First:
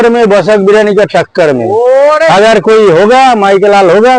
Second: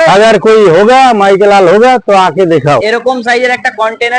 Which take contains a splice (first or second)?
second